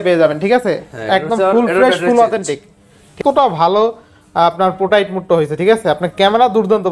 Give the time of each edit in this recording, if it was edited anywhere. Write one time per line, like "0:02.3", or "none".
0:03.1